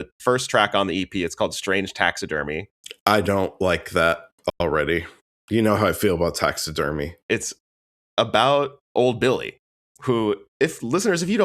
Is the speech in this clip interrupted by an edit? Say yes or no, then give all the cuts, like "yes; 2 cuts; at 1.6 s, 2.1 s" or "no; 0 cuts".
yes; 1 cut; at 7.2 s